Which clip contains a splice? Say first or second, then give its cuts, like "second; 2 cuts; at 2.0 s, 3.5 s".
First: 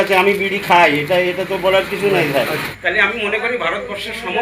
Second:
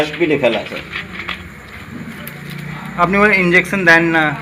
first; 1 cut; at 2.7 s